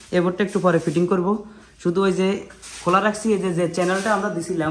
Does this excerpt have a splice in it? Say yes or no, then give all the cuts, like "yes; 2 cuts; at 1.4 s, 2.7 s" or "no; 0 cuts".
no; 0 cuts